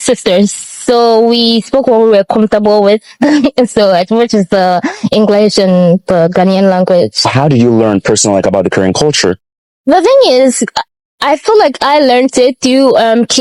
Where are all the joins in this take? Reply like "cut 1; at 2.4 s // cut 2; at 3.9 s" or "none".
none